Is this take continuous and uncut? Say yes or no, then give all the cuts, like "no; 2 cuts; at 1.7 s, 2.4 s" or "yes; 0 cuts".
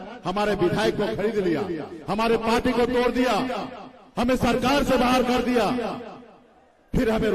yes; 0 cuts